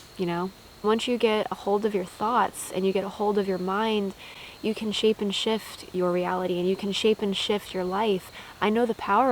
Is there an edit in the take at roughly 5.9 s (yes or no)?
no